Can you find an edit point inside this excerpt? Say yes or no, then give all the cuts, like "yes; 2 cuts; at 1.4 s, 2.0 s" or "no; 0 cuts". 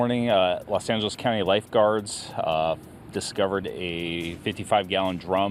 no; 0 cuts